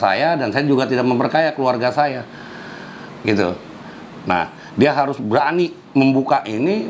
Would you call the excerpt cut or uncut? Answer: uncut